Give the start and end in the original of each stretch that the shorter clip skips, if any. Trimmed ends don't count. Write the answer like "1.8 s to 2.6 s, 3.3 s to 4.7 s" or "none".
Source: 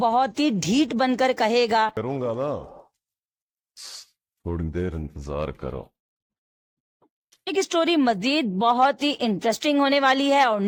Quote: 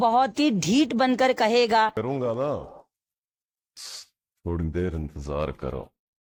none